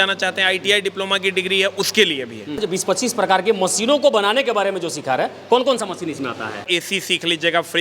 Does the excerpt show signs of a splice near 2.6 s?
yes; 2 cuts; at 2.6 s, 6.7 s

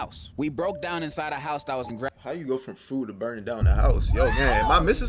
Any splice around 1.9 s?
yes; 1 cut; at 1.9 s

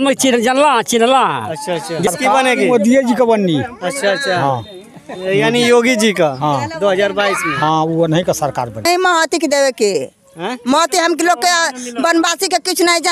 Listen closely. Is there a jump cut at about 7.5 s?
no; 2 cuts; at 2.1 s, 8.8 s

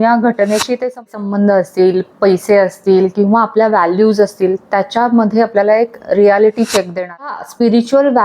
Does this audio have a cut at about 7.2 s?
yes; 2 cuts; at 1.0 s, 7.2 s

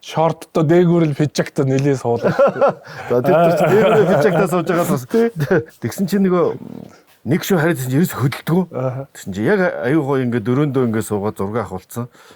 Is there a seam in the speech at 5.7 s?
yes; 1 cut; at 5.7 s

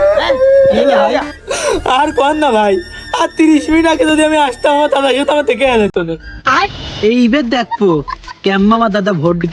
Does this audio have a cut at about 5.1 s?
no; 2 cuts; at 1.4 s, 6.4 s

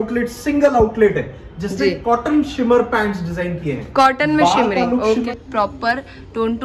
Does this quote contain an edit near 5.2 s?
yes; 1 cut; at 5.2 s

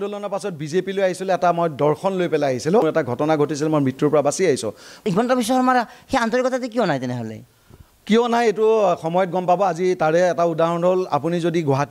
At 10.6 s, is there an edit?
no; 2 cuts; at 2.8 s, 5.0 s

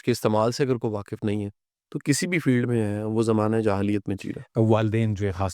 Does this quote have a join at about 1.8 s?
no; 1 cut; at 4.3 s

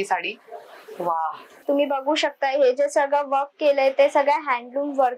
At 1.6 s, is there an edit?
yes; 1 cut; at 1.6 s

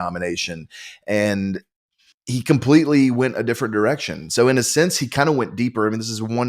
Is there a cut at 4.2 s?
no; 0 cuts

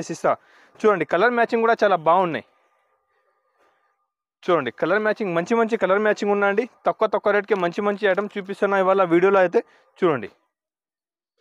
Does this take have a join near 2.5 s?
no; 0 cuts

